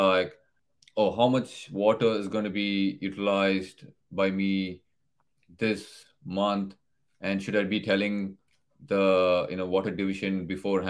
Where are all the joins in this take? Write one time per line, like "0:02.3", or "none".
none